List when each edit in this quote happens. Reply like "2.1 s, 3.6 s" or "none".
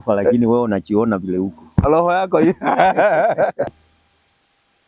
3.7 s